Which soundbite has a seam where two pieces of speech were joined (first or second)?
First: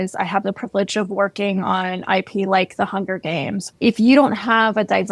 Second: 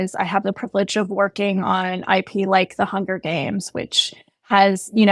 first